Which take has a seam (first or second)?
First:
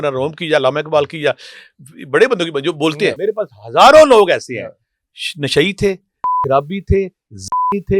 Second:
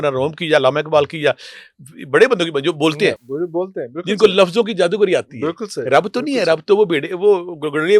first